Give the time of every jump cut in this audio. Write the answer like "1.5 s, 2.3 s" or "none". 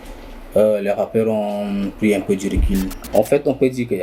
3.0 s